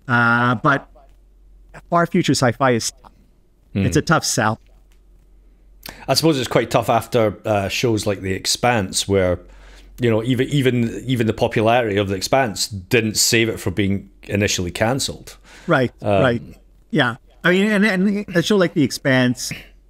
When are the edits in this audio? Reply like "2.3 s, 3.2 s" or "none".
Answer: none